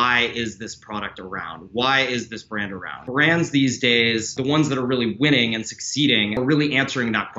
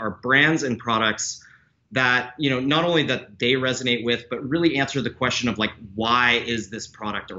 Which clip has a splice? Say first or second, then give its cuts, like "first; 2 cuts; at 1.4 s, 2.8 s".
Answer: first; 3 cuts; at 2.9 s, 4.4 s, 6.4 s